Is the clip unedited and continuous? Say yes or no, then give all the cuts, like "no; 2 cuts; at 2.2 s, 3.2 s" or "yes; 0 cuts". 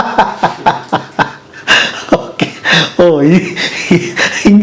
yes; 0 cuts